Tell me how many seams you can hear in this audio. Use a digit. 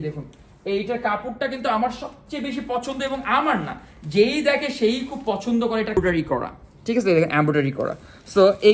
1